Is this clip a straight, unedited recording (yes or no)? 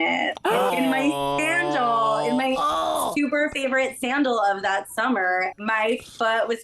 no